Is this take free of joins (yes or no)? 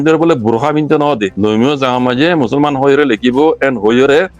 no